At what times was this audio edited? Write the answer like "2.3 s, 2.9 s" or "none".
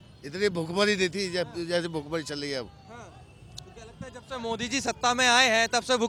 none